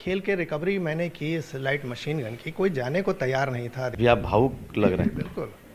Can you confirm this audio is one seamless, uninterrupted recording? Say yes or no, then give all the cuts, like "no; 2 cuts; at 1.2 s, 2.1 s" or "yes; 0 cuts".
no; 1 cut; at 3.9 s